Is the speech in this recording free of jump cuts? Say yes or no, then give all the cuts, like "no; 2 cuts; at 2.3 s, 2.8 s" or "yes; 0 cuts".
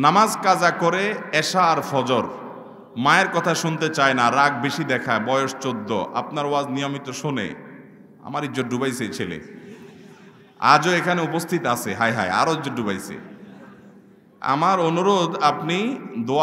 yes; 0 cuts